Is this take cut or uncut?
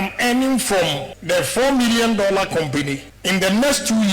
cut